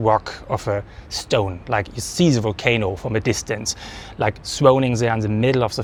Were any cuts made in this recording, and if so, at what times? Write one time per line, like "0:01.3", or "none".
none